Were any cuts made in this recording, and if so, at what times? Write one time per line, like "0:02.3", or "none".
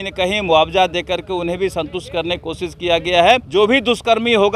0:03.5